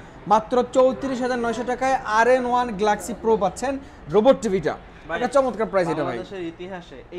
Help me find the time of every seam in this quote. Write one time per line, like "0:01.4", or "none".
none